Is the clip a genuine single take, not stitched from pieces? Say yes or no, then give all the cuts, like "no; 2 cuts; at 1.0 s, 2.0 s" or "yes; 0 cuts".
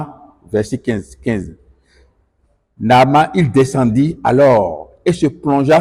yes; 0 cuts